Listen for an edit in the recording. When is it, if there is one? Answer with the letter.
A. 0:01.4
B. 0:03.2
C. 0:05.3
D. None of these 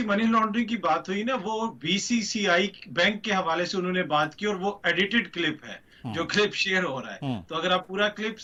D